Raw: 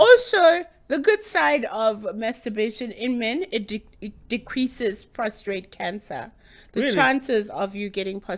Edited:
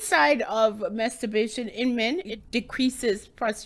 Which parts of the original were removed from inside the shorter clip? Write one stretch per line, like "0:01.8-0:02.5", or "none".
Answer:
0:03.6-0:04.1